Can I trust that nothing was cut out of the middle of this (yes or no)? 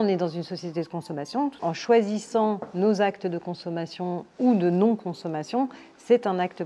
no